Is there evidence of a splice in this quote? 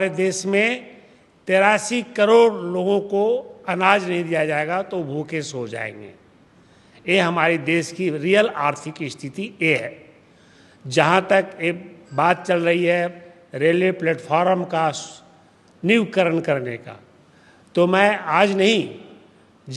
no; 0 cuts

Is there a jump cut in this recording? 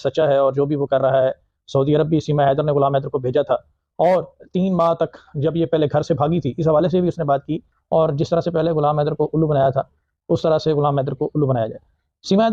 yes; 1 cut; at 7.7 s

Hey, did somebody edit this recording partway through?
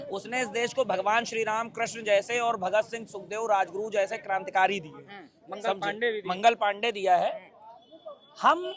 no; 0 cuts

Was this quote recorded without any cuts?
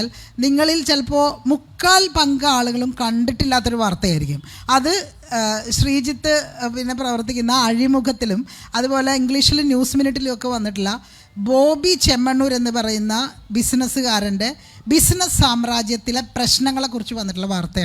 yes; 0 cuts

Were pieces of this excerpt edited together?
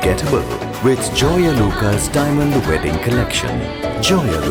no; 0 cuts

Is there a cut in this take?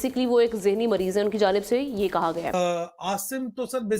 yes; 1 cut; at 2.5 s

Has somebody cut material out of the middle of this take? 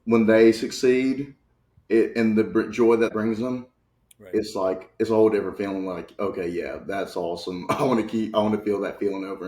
yes; 1 cut; at 3.1 s

